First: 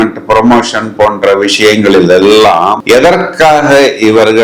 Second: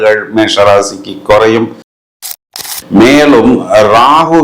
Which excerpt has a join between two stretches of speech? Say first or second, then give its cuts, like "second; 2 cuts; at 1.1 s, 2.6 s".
second; 1 cut; at 2.2 s